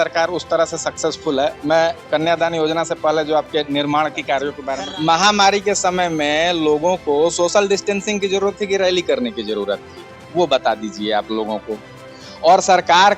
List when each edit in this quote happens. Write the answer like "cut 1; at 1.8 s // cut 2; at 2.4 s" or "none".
cut 1; at 4.7 s